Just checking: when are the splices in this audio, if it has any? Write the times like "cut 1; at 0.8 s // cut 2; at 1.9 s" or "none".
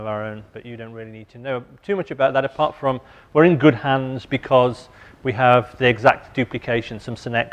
none